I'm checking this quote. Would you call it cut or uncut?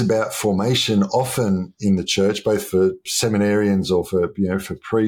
cut